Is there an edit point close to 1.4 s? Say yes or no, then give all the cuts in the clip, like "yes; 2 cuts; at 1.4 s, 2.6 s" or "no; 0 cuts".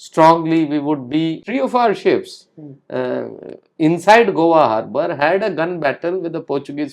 yes; 1 cut; at 1.4 s